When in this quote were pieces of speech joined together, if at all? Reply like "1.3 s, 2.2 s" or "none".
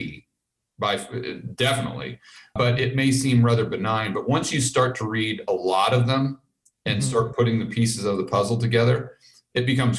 2.5 s